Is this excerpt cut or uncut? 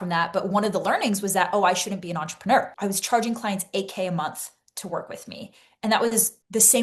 cut